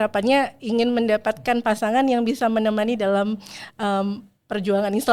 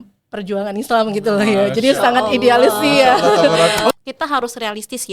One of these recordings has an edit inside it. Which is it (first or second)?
second